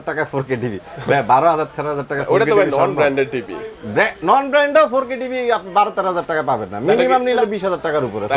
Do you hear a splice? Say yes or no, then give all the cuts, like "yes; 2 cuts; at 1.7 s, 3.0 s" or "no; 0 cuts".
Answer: yes; 1 cut; at 7.4 s